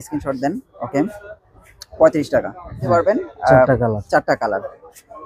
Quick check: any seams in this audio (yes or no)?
yes